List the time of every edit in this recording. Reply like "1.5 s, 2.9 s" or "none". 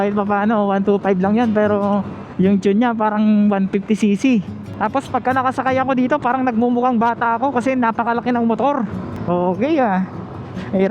4.6 s, 9.1 s